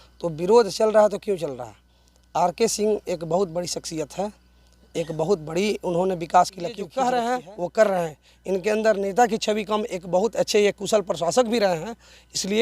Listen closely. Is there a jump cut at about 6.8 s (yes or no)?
yes